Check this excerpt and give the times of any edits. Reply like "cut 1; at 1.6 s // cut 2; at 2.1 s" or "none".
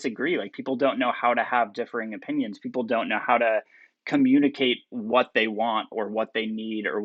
none